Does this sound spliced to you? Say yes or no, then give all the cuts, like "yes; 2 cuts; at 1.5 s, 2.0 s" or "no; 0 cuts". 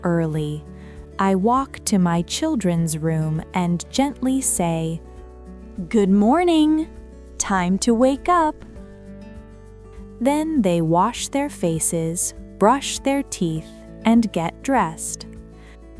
yes; 1 cut; at 15.0 s